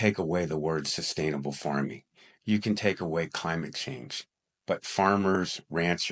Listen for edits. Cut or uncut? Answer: uncut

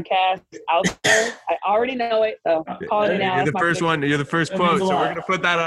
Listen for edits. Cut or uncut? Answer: cut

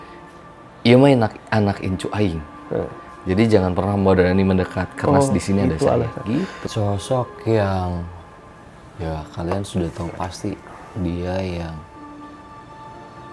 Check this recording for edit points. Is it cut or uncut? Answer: cut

